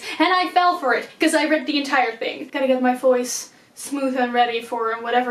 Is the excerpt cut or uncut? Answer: cut